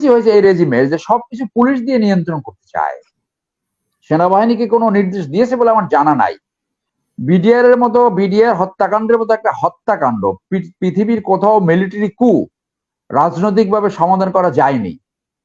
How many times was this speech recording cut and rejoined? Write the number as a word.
zero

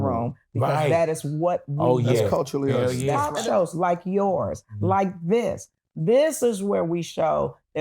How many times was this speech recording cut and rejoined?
one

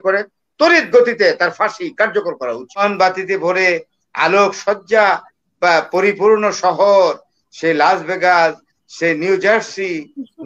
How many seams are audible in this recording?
one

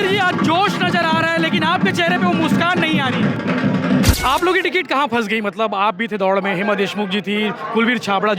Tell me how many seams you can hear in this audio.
one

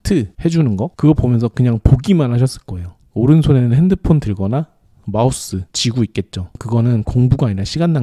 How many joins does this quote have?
zero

